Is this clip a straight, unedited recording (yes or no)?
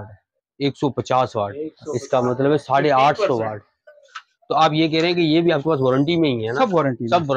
no